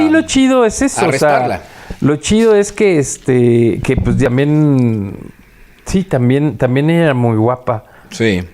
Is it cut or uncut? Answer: cut